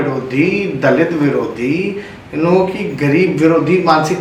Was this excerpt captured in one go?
yes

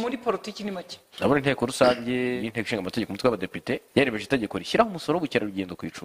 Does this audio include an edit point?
yes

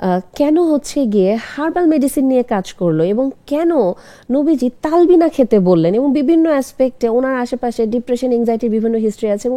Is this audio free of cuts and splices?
yes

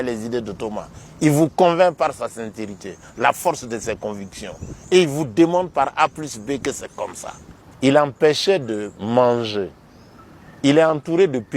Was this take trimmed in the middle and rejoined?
yes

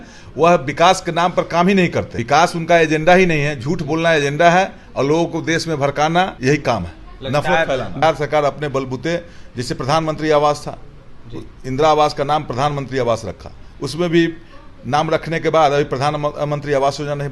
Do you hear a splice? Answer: yes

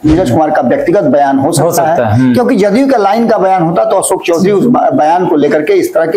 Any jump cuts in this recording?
no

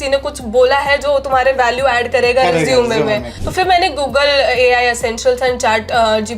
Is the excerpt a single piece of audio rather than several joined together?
no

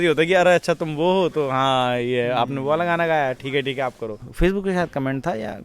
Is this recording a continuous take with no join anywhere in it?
no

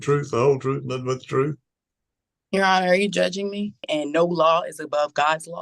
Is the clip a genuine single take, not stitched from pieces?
no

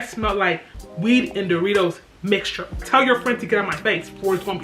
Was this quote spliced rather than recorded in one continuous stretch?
yes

